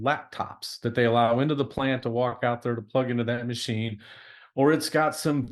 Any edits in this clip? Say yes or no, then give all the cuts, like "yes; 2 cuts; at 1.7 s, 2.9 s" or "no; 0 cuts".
no; 0 cuts